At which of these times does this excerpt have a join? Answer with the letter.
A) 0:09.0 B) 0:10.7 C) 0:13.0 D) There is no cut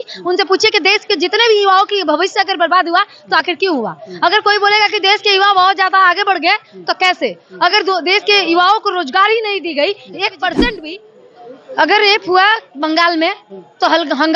B